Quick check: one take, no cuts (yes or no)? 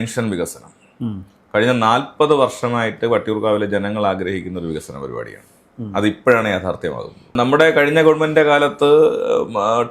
yes